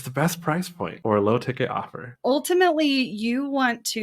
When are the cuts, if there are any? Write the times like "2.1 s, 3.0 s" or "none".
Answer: 1.0 s, 2.1 s